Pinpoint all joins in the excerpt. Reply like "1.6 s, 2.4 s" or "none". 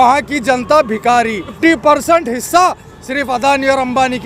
1.5 s